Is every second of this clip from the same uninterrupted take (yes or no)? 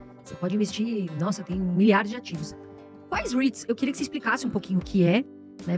yes